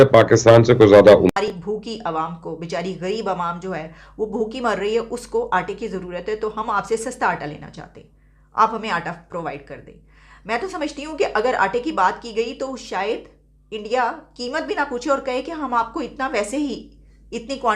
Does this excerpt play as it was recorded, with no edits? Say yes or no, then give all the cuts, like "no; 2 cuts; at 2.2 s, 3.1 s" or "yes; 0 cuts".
no; 1 cut; at 1.3 s